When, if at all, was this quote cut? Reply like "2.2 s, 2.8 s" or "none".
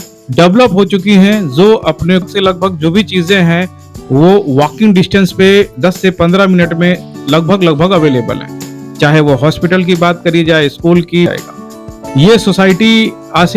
2.2 s, 11.3 s